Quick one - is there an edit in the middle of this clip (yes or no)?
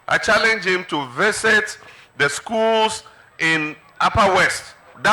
no